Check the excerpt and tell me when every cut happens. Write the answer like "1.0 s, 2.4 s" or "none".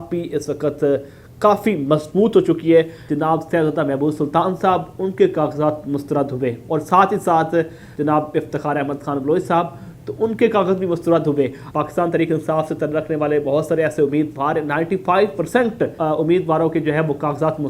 3.0 s, 7.8 s, 11.6 s, 16.0 s